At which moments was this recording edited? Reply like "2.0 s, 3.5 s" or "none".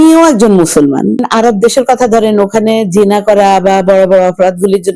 1.2 s